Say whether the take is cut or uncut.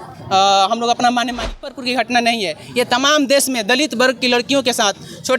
cut